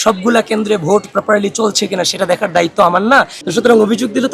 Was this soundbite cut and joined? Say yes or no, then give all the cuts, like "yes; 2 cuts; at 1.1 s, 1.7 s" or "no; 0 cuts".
yes; 1 cut; at 3.4 s